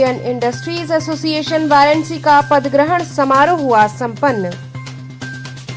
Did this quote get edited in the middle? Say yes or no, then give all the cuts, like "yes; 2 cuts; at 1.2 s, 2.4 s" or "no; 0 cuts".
no; 0 cuts